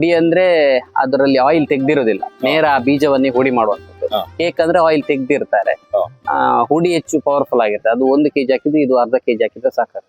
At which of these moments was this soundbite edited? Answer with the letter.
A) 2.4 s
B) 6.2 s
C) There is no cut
C